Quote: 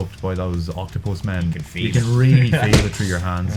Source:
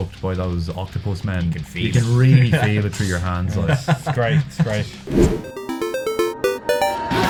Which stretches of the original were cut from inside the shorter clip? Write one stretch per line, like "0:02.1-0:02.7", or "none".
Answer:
none

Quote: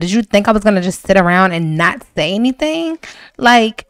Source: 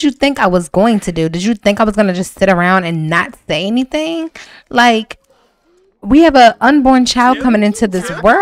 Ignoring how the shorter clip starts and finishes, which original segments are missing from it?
none

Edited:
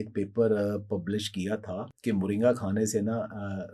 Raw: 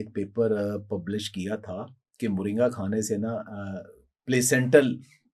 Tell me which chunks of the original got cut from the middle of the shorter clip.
0:01.9-0:02.1

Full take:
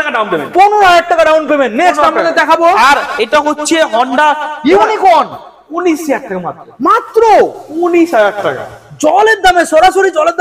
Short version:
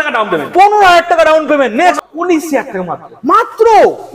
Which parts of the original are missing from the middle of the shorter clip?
0:02.0-0:05.5

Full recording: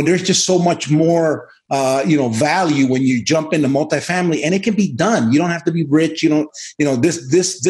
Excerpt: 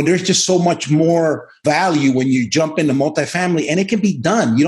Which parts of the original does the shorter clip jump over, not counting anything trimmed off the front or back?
0:01.6-0:02.3

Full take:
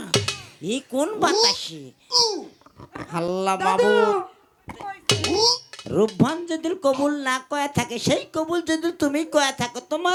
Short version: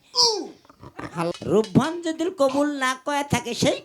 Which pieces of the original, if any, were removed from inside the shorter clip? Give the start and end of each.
0:03.3-0:05.8

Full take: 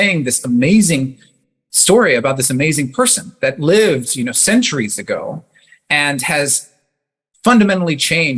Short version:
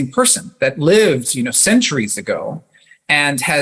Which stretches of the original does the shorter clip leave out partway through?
none

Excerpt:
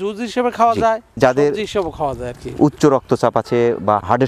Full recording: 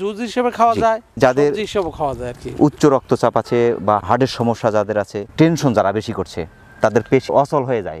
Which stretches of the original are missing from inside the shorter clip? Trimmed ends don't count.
none

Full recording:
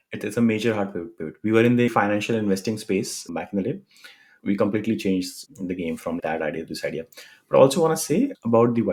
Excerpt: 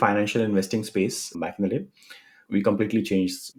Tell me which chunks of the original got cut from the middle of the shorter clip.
none

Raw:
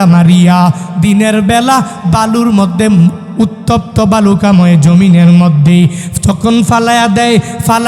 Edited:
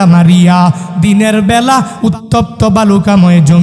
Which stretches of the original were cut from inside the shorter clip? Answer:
0:01.9-0:03.3

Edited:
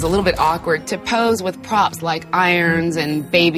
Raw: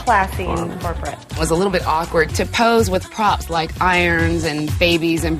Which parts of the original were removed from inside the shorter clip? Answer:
none

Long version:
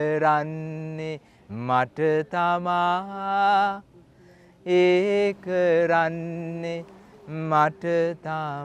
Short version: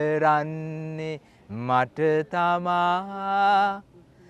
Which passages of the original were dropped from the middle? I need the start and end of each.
none

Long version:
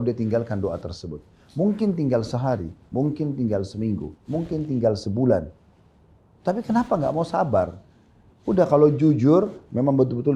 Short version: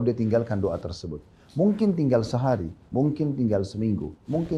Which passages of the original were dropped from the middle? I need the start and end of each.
none

